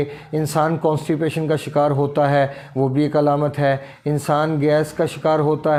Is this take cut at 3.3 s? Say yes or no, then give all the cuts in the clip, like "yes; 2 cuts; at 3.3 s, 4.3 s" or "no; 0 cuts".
no; 0 cuts